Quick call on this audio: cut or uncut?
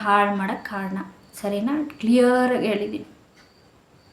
uncut